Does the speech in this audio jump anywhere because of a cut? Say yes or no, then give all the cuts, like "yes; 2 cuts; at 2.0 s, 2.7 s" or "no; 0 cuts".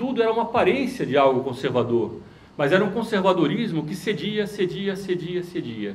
no; 0 cuts